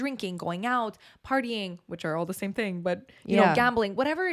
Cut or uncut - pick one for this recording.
uncut